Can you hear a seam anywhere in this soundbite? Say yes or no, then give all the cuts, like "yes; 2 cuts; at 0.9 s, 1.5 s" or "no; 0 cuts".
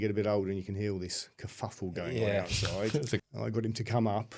yes; 1 cut; at 3.2 s